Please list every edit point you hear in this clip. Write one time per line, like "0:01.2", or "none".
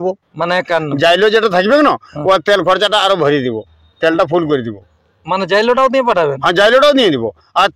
none